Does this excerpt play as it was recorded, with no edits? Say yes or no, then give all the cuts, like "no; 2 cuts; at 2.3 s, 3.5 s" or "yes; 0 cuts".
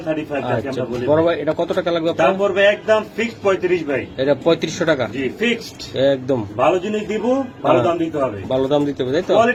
yes; 0 cuts